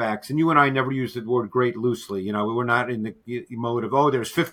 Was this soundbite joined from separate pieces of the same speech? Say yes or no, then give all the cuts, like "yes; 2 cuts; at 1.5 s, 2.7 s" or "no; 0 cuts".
no; 0 cuts